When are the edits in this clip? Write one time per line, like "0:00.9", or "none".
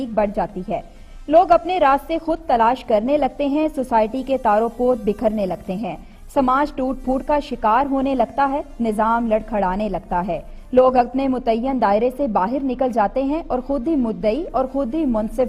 none